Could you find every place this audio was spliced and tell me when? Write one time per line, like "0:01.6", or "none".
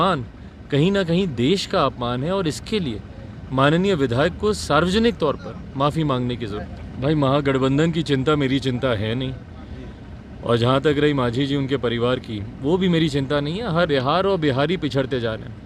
0:06.7
0:13.9